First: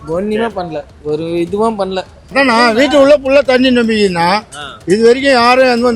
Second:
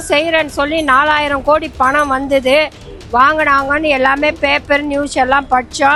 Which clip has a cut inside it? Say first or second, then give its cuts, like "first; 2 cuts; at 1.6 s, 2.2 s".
first; 1 cut; at 2.1 s